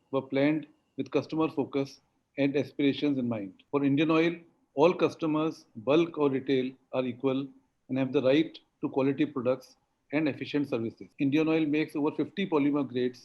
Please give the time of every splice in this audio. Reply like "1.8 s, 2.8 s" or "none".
3.5 s, 11.0 s